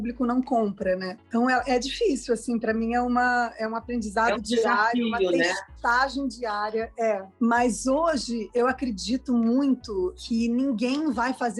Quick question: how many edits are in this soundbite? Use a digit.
1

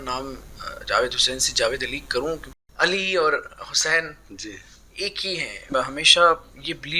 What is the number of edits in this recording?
2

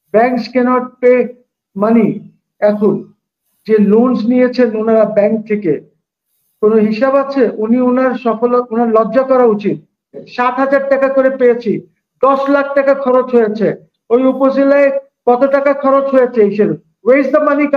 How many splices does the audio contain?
1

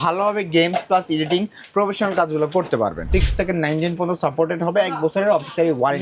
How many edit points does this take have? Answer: 1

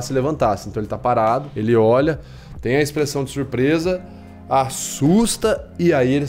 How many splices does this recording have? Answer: 1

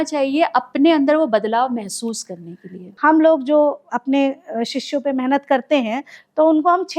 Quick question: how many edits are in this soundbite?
1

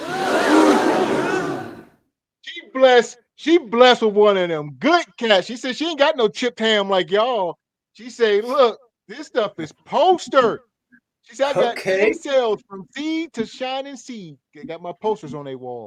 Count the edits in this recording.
0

